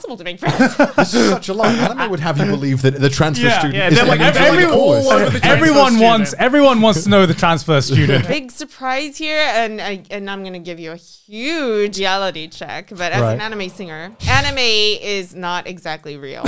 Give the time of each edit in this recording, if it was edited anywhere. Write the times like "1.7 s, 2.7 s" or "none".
8.2 s, 11.9 s, 14.2 s